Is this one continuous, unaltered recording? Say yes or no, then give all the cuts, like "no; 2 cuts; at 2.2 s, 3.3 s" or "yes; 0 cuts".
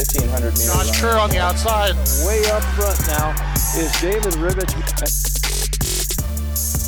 yes; 0 cuts